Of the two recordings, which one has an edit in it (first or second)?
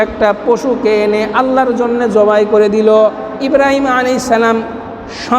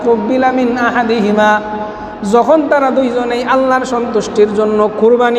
first